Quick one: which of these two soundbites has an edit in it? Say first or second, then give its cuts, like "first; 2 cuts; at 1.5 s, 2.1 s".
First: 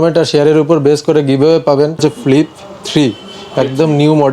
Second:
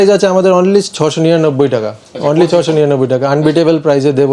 first; 1 cut; at 2.0 s